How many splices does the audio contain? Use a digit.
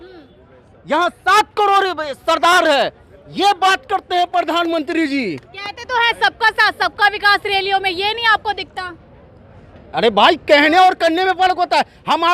0